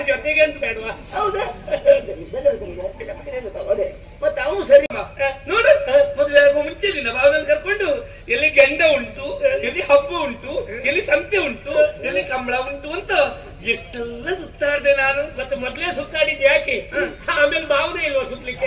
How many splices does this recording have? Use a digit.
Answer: 1